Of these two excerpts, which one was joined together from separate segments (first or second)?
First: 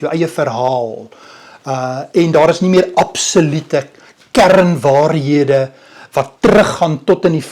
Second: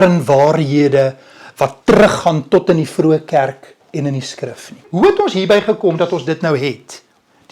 second